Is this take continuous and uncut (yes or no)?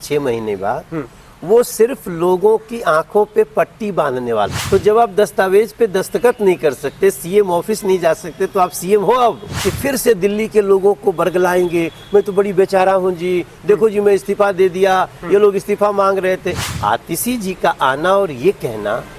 no